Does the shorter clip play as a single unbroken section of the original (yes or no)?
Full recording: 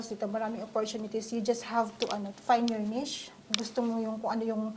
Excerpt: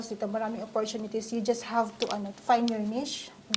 yes